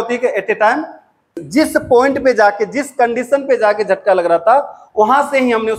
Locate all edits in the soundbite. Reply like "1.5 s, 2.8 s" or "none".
1.4 s

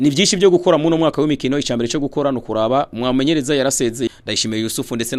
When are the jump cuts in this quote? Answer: 4.1 s

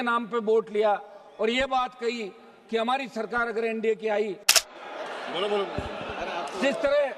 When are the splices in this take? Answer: 4.6 s

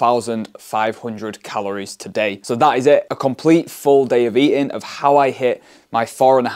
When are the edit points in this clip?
none

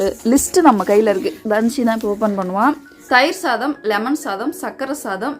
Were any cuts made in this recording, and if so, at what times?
3.0 s

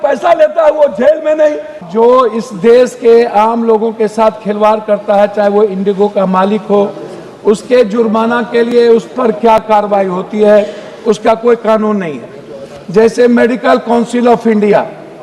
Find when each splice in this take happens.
1.8 s

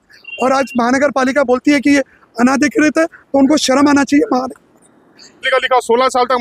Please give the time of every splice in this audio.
5.4 s

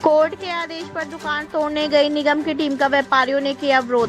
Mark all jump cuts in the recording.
none

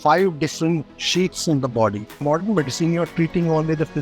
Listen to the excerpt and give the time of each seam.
2.2 s

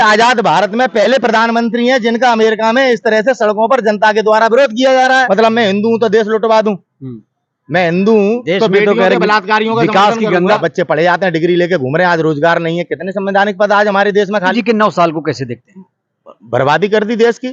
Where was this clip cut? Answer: 5.1 s, 10.4 s, 14.5 s

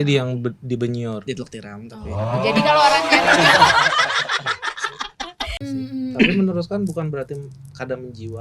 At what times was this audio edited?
5.6 s

